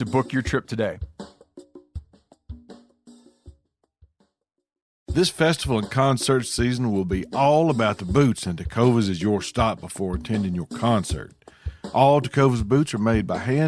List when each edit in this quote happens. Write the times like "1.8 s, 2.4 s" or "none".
5.1 s